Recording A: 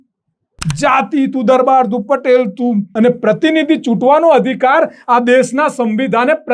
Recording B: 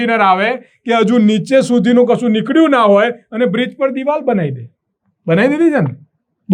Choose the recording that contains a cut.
A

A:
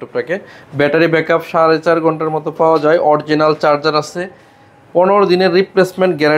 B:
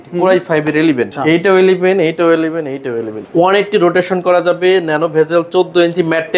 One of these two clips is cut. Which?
B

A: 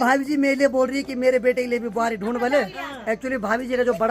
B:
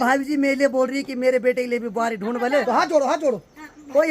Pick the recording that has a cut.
B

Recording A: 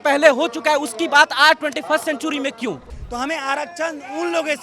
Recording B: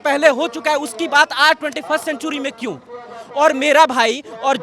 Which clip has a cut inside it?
A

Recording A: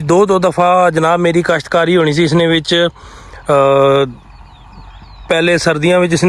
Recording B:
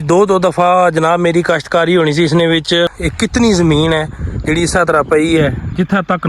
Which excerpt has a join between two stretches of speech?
B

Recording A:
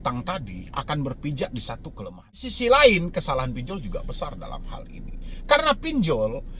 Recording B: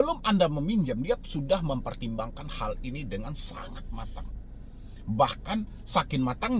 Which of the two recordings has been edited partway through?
A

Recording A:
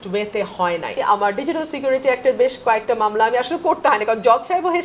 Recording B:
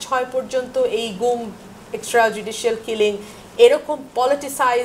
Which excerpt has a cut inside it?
A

